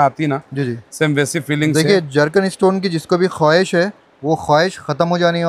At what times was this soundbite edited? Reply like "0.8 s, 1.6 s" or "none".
none